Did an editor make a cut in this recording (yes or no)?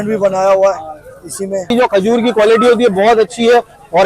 yes